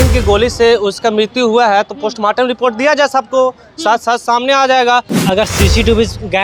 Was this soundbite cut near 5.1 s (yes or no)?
yes